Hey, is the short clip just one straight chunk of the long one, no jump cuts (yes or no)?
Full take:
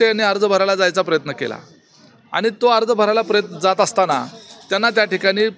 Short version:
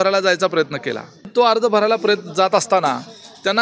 no